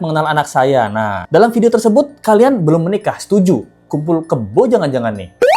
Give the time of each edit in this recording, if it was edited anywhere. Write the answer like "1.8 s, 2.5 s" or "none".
1.2 s